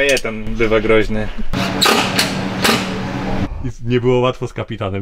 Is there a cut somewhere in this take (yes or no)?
yes